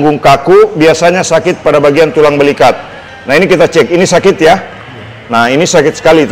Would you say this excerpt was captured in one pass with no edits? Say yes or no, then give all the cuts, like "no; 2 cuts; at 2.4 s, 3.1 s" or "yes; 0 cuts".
yes; 0 cuts